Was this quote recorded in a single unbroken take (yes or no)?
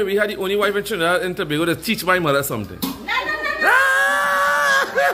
yes